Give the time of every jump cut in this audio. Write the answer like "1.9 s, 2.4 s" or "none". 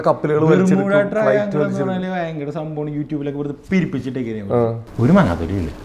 4.8 s